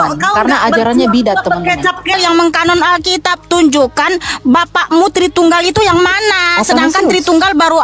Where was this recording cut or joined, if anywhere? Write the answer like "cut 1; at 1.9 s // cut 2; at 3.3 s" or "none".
cut 1; at 2.1 s